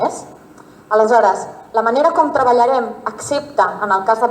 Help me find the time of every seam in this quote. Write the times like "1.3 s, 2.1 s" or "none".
1.6 s